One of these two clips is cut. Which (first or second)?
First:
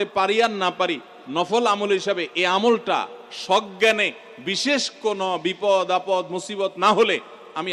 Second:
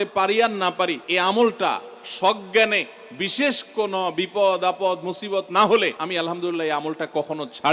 second